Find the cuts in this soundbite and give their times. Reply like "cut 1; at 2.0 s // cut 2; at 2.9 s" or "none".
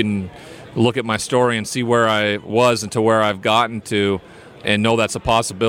cut 1; at 2.5 s // cut 2; at 4.5 s